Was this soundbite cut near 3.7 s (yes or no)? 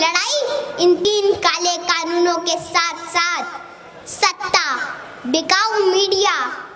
no